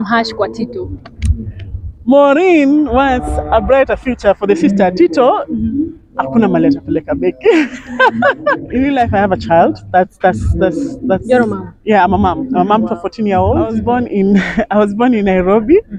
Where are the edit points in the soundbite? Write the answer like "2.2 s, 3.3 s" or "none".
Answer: 8.6 s, 13.8 s